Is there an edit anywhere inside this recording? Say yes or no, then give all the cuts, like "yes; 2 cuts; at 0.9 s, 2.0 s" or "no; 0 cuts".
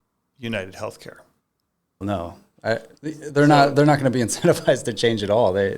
yes; 1 cut; at 2.0 s